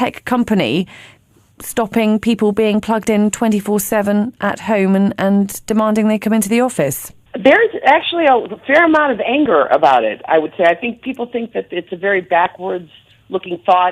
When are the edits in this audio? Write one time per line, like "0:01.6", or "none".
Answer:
0:08.1